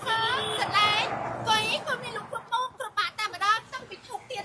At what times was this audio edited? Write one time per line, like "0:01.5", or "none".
none